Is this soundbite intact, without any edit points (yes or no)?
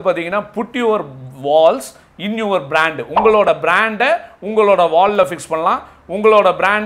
yes